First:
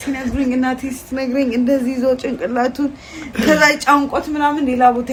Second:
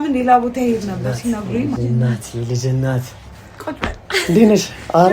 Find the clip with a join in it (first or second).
second